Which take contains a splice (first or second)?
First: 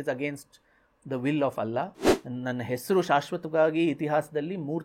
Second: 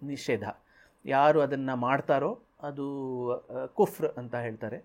first